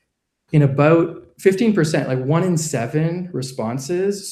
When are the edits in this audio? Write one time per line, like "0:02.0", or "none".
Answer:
0:03.3